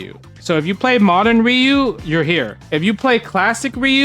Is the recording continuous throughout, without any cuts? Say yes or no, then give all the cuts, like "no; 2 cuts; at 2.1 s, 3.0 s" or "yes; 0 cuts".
no; 1 cut; at 2.0 s